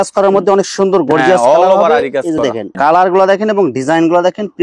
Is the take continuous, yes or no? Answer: no